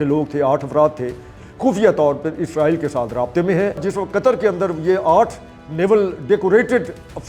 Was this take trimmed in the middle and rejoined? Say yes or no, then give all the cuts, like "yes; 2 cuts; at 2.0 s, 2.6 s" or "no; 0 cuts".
yes; 2 cuts; at 1.4 s, 3.8 s